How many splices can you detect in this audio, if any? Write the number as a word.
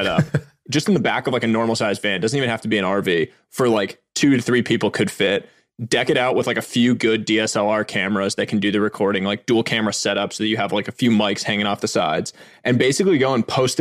zero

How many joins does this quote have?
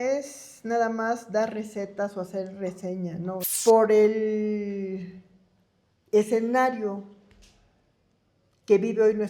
one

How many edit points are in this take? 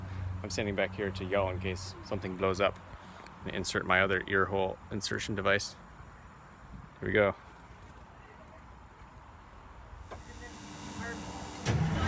one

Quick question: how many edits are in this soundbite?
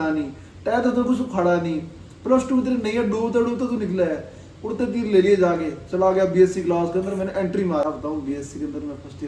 one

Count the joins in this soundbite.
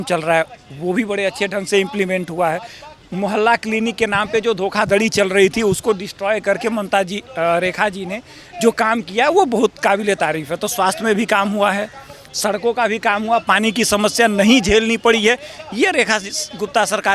zero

